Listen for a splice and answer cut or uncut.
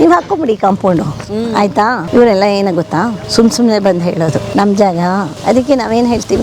cut